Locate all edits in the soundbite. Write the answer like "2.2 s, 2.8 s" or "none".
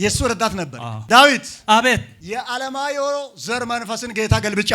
1.0 s

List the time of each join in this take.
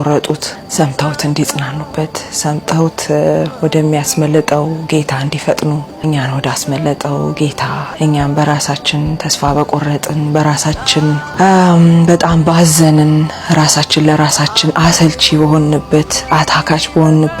5.9 s, 7.9 s, 11.3 s

